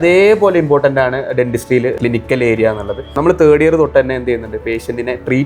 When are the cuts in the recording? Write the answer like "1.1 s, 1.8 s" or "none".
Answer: 2.0 s, 3.1 s